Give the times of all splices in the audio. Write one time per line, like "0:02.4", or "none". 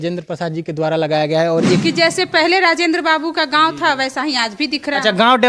0:01.8

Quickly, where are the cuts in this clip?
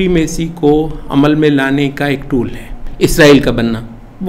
0:02.8

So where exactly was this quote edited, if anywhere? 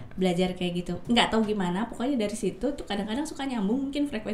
0:01.0

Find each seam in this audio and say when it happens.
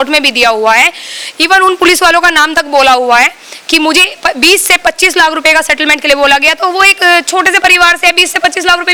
none

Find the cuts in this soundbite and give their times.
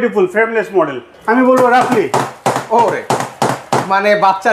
0:01.1

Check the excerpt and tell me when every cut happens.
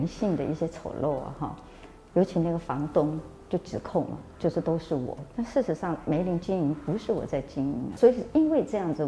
0:07.9

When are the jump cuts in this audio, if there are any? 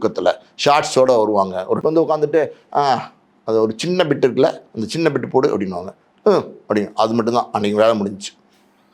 0:01.8

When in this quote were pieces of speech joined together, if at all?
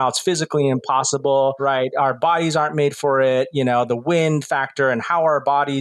0:01.6

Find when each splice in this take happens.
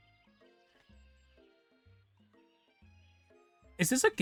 none

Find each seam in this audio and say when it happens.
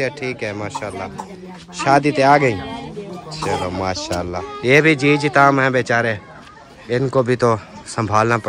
0:04.4

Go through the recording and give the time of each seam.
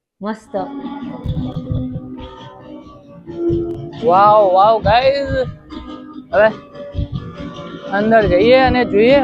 0:01.1

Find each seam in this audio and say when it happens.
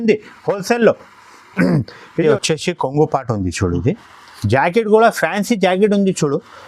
0:02.3

